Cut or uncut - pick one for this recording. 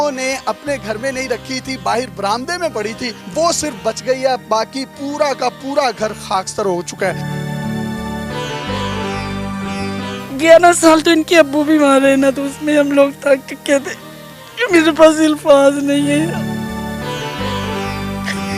cut